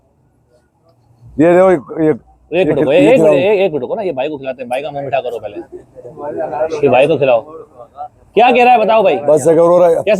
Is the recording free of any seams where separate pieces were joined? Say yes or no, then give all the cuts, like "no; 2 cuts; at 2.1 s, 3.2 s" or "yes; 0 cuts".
yes; 0 cuts